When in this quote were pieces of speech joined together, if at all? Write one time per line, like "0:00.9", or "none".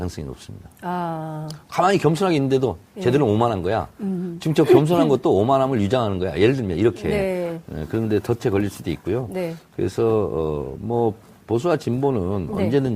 0:07.8